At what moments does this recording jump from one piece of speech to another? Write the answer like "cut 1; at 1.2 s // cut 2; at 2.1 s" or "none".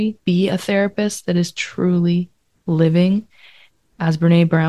none